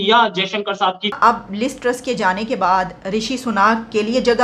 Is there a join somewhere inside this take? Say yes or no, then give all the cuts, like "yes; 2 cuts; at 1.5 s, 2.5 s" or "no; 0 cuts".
yes; 1 cut; at 1.2 s